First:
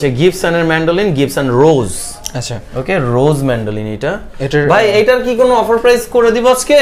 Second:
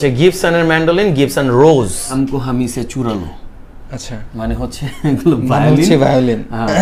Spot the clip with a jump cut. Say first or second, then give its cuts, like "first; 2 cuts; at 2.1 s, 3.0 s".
second; 1 cut; at 2.1 s